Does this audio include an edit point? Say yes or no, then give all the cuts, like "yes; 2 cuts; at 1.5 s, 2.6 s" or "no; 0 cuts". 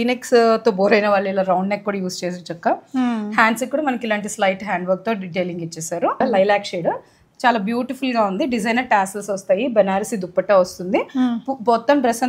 yes; 1 cut; at 6.2 s